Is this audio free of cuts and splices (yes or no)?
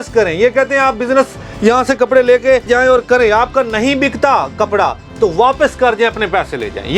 yes